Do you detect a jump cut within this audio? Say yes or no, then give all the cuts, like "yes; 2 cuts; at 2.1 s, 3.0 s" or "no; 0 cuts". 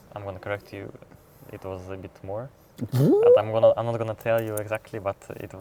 no; 0 cuts